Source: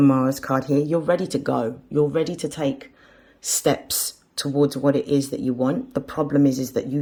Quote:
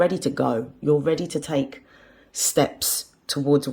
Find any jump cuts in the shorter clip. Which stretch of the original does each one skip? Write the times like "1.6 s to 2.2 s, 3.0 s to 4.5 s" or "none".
none